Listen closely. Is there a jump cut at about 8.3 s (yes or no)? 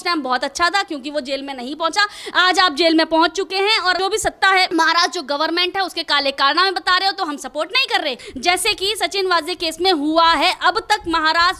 yes